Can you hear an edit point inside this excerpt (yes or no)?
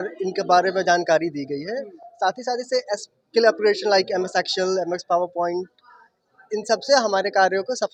no